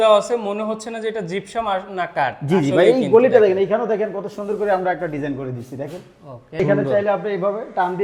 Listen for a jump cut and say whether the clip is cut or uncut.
cut